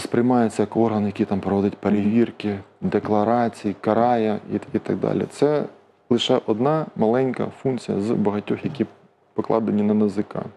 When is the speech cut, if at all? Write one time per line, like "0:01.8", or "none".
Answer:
none